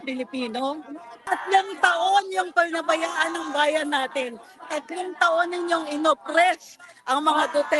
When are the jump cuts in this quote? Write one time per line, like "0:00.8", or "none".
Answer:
0:01.1